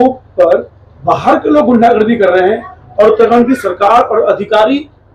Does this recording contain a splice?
no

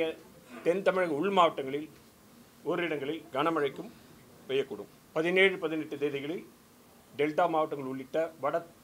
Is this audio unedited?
no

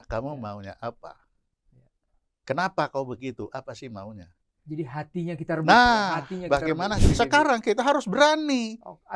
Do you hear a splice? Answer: yes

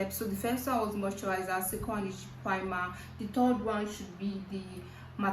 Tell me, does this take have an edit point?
no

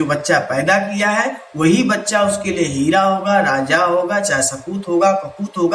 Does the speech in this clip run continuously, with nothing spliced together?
yes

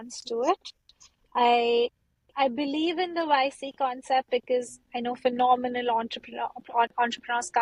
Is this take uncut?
yes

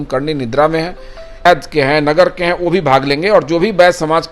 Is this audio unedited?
no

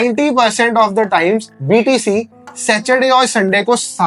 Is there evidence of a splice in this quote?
no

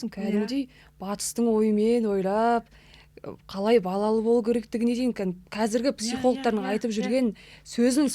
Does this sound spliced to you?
no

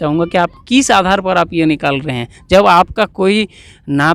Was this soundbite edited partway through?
no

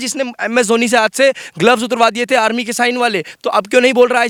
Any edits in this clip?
no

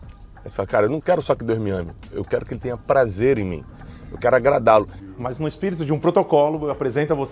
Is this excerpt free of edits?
no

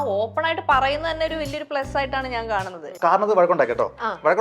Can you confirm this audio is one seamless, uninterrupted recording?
no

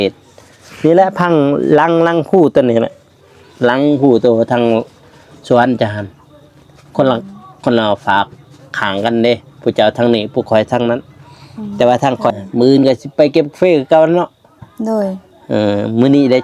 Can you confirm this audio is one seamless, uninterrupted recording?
no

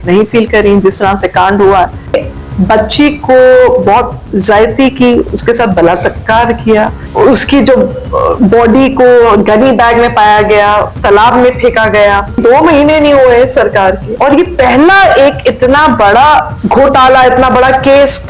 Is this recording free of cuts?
no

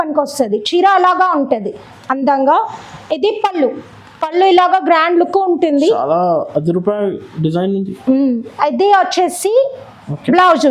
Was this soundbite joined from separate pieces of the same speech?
no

